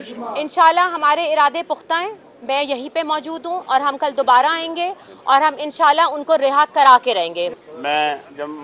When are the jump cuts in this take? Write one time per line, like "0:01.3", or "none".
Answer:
0:07.6